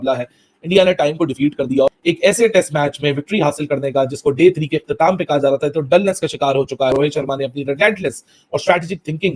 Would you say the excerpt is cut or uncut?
cut